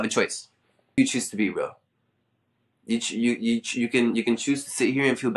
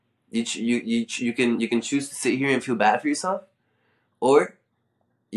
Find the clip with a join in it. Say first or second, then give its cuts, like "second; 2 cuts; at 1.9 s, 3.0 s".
first; 1 cut; at 1.0 s